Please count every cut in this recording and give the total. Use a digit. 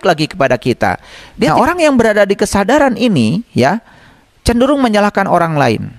1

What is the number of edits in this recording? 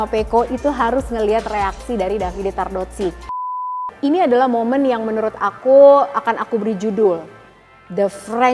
1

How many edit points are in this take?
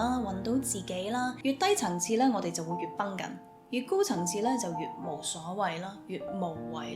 1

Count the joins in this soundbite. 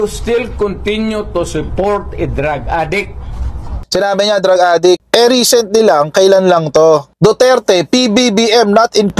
2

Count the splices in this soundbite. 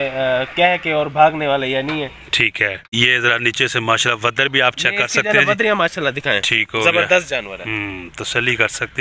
1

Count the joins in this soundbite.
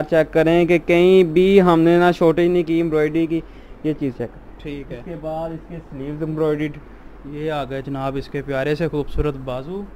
0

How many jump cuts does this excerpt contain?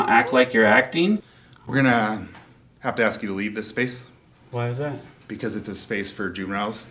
1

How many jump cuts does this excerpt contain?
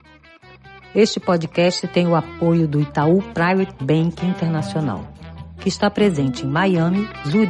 1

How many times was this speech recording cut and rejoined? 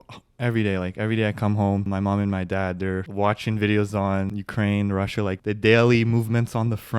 4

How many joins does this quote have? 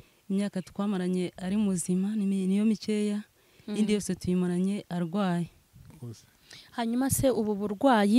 1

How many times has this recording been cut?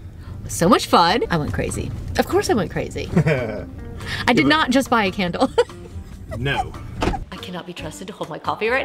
2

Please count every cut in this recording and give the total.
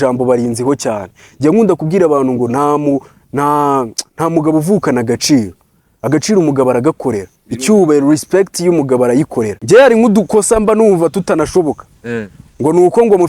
1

